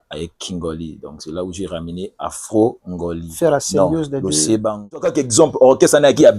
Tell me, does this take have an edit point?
yes; 1 cut; at 5.1 s

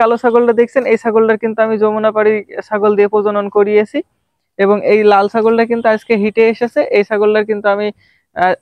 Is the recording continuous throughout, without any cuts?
yes; 0 cuts

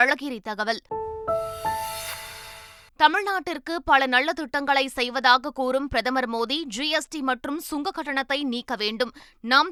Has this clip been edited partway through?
no; 0 cuts

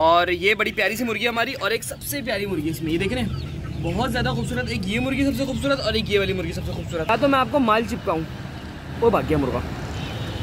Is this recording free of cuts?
no; 1 cut; at 7.1 s

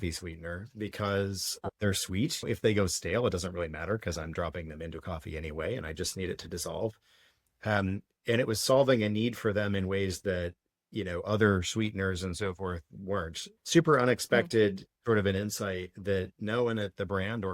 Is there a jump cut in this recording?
yes; 1 cut; at 1.5 s

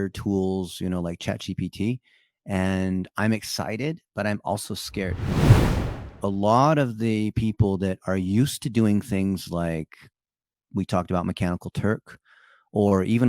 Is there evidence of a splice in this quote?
yes; 1 cut; at 5.6 s

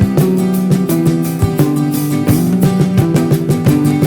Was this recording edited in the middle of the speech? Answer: no; 0 cuts

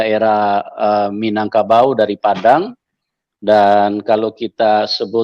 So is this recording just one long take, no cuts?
yes; 0 cuts

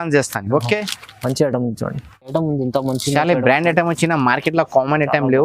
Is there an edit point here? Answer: yes; 1 cut; at 2.3 s

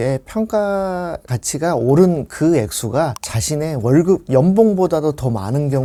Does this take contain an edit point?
no; 0 cuts

